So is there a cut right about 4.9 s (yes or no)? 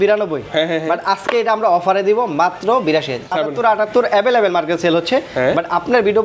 no